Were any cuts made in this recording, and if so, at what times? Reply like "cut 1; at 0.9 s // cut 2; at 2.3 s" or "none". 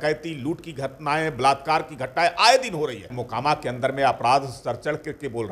cut 1; at 3.2 s